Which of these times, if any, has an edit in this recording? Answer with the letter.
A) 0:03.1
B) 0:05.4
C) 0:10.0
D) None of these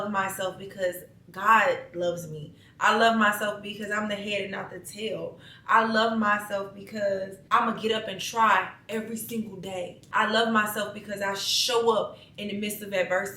C